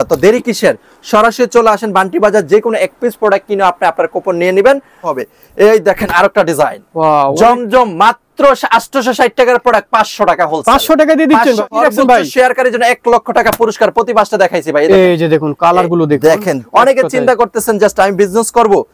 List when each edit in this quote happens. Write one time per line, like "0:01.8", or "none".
0:05.1
0:11.7
0:16.6

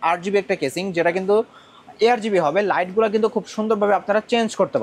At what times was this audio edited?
none

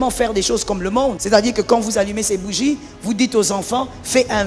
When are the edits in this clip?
0:01.2

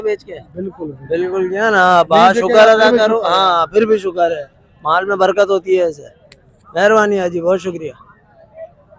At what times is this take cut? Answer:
none

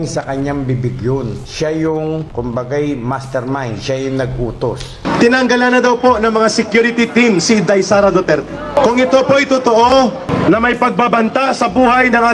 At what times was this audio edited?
0:05.0
0:08.8
0:10.3

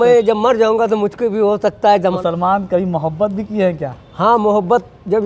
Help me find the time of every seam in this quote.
0:02.2

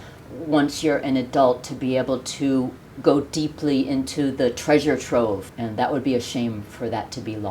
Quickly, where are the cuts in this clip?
0:05.5

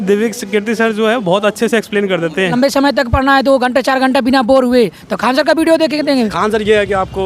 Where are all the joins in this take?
0:02.5
0:06.3

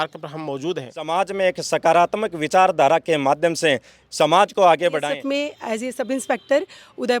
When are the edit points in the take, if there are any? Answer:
0:01.1
0:05.0

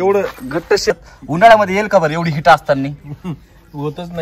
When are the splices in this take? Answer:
0:01.0

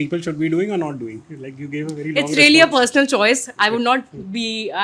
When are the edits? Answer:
none

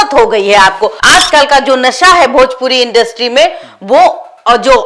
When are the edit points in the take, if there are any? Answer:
0:00.9

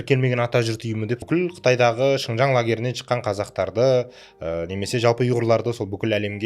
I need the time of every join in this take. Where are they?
0:01.2

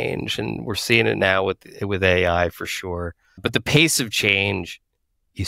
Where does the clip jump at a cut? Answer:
none

